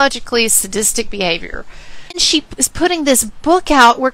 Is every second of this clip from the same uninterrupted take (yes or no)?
no